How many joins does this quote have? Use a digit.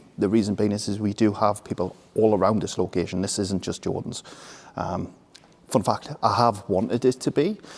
0